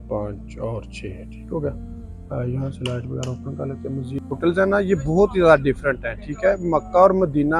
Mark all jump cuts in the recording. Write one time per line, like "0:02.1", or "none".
0:04.4